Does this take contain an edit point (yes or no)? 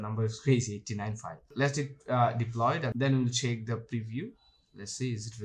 no